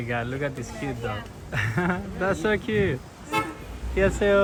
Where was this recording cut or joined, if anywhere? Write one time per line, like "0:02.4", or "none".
none